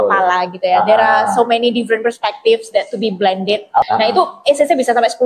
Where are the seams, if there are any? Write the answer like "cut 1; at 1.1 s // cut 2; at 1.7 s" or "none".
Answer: cut 1; at 3.8 s